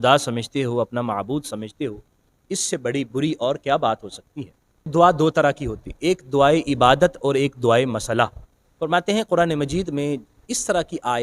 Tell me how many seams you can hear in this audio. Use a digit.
1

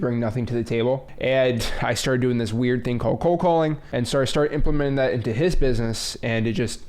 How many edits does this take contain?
2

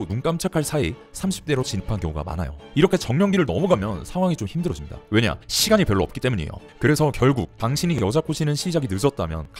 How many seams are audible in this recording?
1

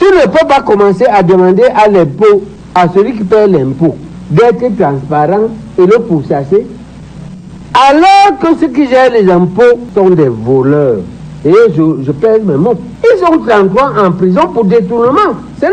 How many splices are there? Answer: 0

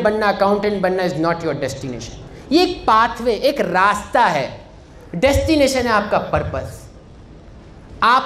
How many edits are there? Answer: 0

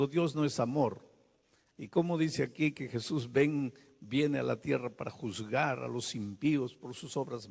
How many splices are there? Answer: 1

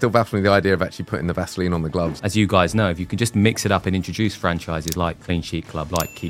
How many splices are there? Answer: 2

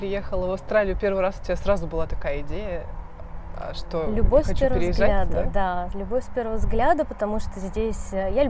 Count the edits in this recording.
0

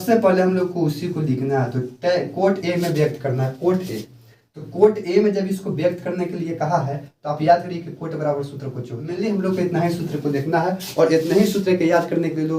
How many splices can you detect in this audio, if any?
1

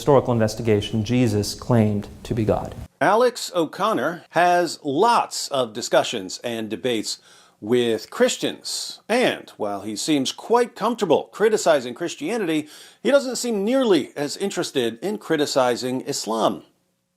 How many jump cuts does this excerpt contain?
2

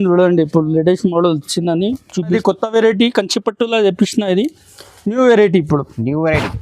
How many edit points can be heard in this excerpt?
1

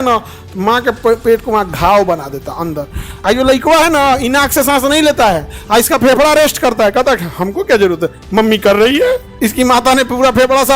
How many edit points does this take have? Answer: 2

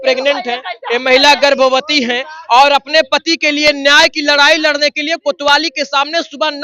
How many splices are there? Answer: 0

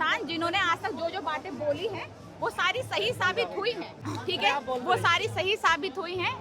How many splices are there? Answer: 1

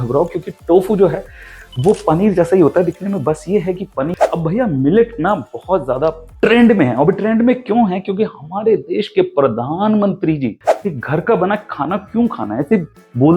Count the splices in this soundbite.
2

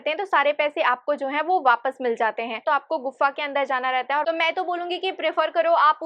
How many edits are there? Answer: 2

